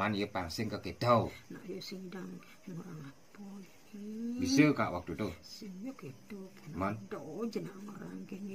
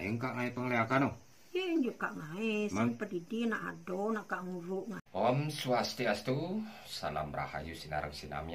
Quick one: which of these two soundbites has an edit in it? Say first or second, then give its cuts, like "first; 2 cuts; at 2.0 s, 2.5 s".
second; 1 cut; at 5.0 s